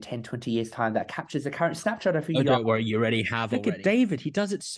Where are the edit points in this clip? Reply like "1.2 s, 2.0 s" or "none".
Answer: 3.4 s